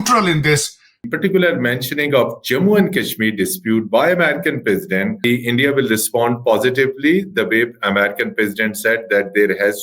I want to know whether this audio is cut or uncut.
cut